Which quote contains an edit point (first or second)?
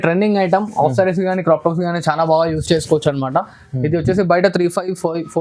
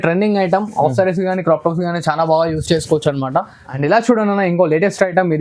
second